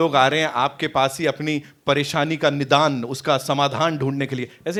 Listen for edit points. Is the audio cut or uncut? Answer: uncut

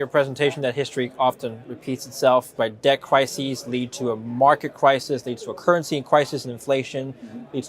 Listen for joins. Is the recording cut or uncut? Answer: cut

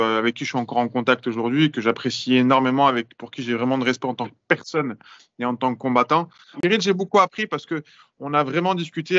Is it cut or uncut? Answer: cut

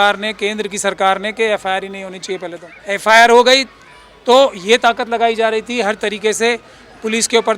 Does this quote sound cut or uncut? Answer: cut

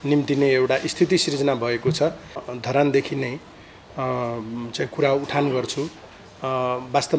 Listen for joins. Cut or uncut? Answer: cut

